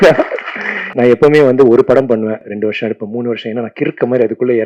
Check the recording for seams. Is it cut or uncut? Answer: cut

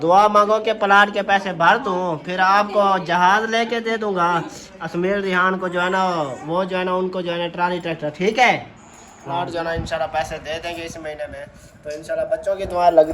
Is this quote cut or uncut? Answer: cut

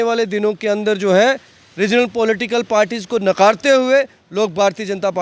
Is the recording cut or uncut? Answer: uncut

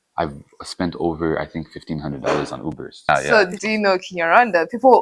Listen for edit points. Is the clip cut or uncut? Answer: cut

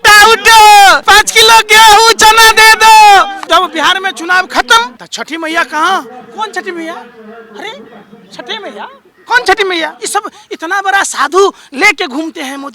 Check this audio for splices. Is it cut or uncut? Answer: cut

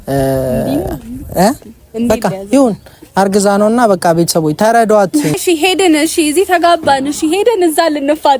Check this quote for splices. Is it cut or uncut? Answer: cut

